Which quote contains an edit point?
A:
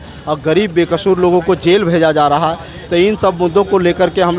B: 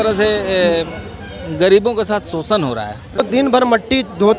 B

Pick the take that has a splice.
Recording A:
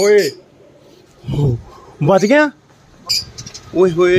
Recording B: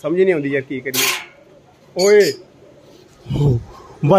A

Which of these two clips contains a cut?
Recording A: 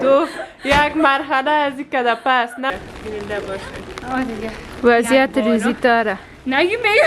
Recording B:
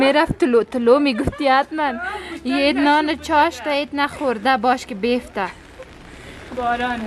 A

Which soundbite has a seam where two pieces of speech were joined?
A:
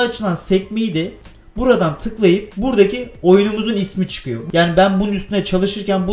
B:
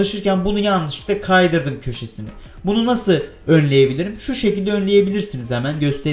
A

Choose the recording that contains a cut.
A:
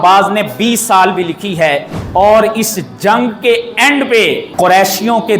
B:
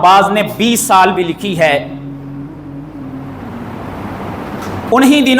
A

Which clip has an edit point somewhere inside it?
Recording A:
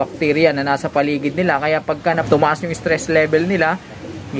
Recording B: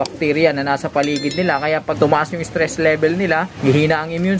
B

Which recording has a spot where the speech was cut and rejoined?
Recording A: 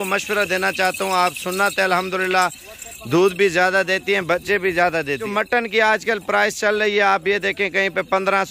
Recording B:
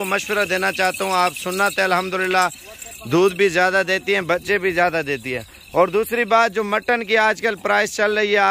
A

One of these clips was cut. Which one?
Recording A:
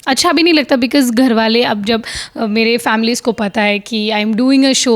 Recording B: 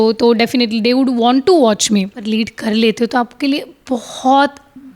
B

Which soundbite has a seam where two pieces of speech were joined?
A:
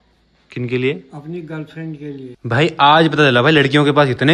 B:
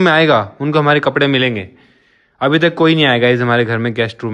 A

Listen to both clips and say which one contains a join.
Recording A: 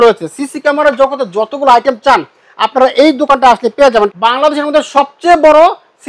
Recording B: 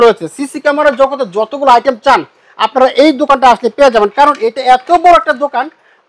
A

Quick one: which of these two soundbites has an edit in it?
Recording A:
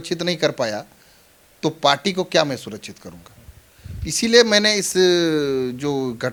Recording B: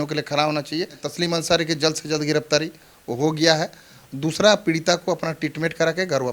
B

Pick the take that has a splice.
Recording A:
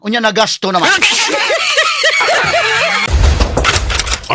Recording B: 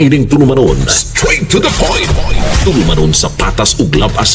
A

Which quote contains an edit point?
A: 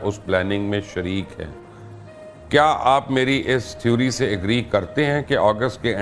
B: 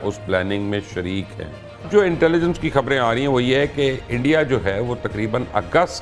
B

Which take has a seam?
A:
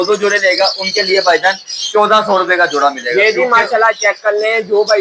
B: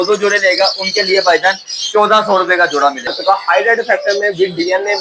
B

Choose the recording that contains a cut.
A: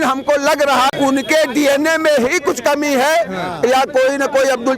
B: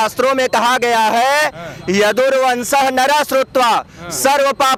A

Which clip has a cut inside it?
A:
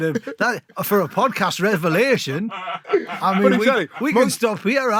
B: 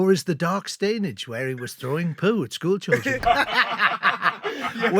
B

